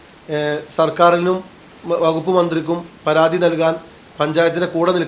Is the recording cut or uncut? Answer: uncut